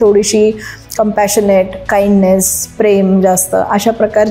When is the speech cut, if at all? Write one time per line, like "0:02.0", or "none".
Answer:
none